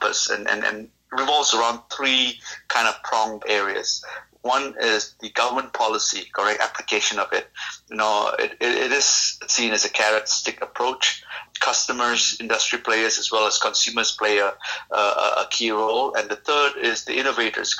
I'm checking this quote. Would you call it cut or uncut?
cut